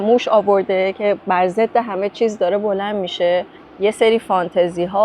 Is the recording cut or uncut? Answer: cut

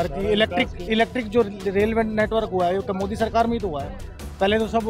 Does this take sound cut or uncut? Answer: uncut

